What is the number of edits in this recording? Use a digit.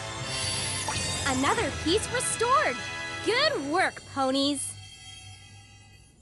1